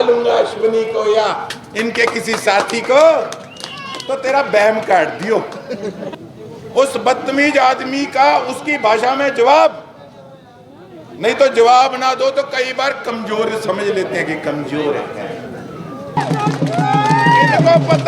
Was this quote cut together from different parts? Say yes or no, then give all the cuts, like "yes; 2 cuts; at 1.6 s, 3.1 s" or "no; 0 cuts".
yes; 2 cuts; at 6.1 s, 16.2 s